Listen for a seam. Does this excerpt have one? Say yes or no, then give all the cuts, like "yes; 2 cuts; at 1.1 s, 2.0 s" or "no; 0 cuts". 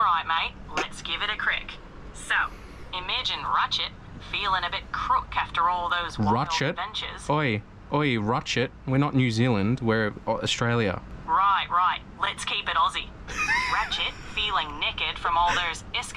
yes; 1 cut; at 11.1 s